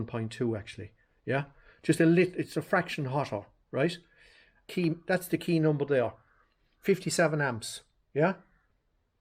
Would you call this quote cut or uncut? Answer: cut